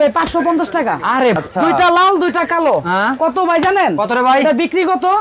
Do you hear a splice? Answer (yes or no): yes